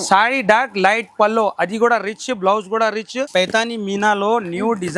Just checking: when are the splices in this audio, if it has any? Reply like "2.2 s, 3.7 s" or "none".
3.2 s